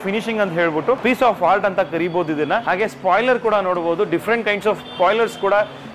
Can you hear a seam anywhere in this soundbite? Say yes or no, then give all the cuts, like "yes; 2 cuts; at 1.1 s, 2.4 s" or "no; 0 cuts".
yes; 2 cuts; at 1.0 s, 2.6 s